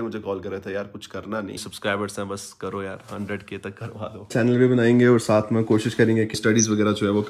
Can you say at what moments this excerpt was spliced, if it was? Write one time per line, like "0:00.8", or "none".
0:01.6
0:04.3
0:06.3